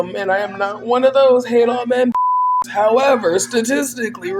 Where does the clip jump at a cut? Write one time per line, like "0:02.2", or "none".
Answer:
none